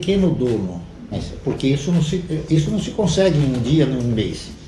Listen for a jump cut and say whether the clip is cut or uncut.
cut